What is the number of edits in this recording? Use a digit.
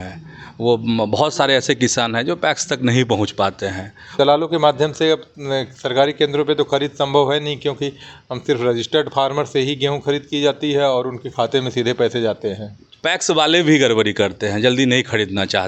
2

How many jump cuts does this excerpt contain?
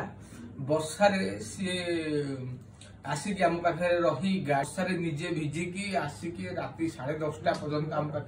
1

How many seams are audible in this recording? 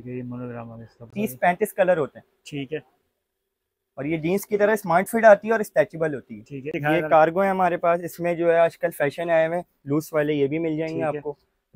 2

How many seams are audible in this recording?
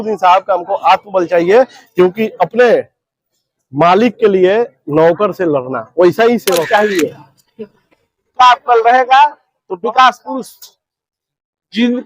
1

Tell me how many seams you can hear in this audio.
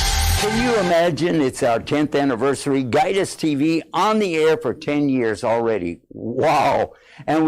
1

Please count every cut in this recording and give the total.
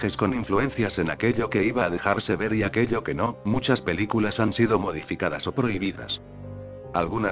1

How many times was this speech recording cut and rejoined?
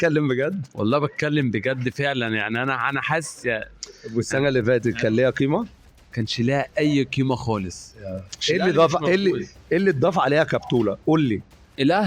0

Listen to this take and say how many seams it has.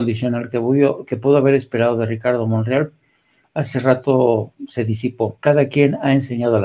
1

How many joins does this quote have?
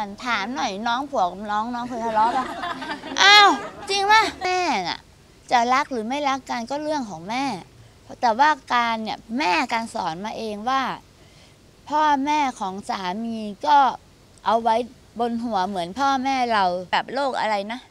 2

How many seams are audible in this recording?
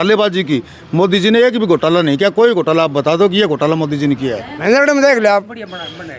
1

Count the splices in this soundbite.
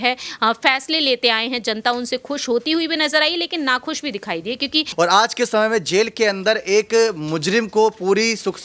1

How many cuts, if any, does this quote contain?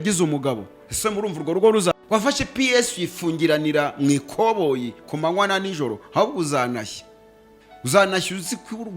1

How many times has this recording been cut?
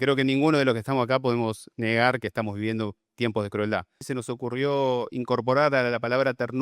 1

